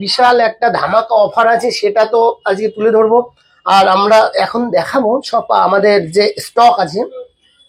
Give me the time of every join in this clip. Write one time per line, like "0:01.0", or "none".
none